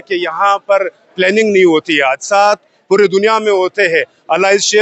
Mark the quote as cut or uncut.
uncut